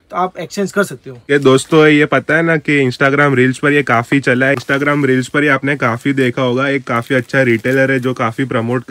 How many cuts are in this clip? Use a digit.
2